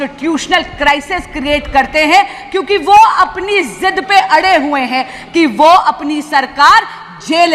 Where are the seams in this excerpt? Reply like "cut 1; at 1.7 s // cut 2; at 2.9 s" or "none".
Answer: none